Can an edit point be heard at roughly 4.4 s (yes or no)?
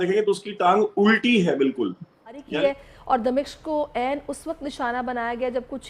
no